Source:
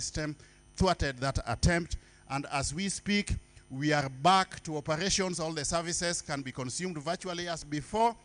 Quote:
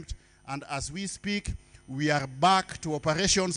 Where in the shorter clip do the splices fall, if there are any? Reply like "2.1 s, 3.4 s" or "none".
none